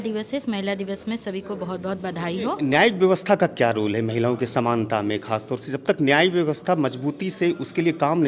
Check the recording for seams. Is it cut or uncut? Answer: cut